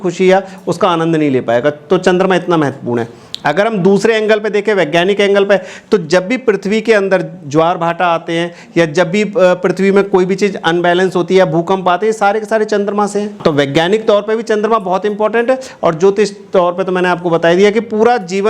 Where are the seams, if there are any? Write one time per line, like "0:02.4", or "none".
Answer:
none